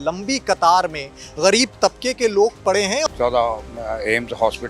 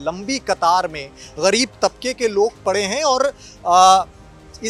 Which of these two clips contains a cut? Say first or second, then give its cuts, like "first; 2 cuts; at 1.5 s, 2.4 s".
first; 1 cut; at 3.0 s